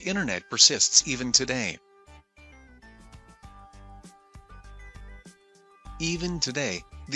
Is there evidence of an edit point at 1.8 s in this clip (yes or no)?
yes